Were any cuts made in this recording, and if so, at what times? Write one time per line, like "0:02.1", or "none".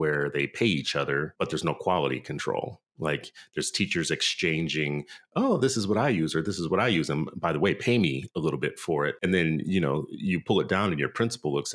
0:01.3
0:09.2